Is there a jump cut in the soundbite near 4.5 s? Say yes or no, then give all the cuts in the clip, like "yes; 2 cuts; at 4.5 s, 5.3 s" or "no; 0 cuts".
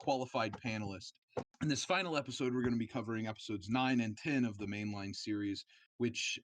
no; 1 cut; at 1.5 s